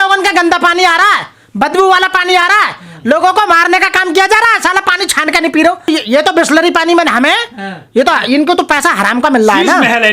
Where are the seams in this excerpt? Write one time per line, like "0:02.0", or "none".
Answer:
none